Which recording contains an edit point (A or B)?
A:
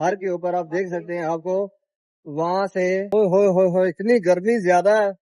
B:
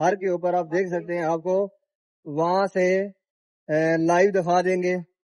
A